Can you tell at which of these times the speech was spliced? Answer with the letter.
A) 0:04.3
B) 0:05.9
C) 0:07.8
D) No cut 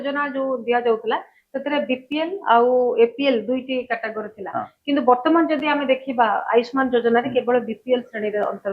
D